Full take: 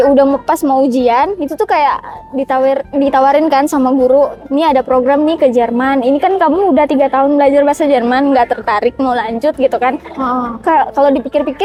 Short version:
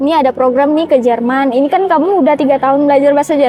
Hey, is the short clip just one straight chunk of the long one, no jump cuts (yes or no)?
yes